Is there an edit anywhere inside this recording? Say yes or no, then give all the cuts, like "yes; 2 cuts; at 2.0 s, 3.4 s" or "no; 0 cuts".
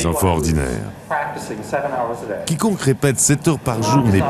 no; 0 cuts